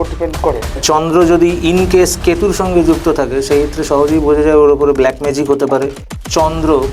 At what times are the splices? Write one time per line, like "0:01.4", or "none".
0:00.8
0:06.0